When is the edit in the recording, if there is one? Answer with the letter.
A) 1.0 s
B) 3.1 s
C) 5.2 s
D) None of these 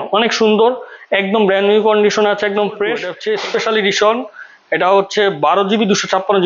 B